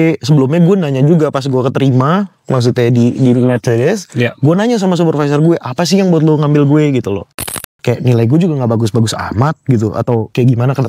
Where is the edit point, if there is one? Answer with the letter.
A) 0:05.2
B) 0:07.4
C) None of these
B